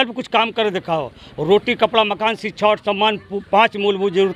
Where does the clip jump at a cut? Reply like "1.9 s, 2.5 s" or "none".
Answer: none